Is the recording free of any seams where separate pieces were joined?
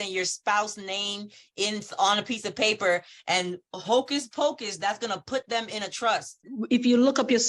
no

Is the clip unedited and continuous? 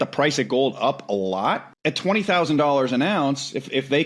no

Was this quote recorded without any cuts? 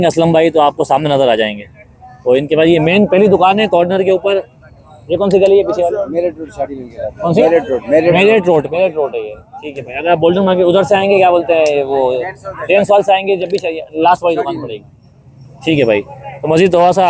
yes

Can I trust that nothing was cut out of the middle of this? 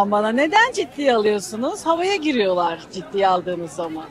yes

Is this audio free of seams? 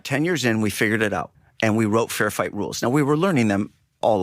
no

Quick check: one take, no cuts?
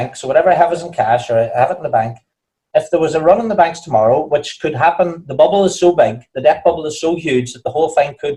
yes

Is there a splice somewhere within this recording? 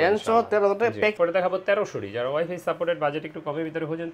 yes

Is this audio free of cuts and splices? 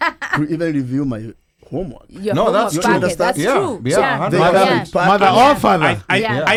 yes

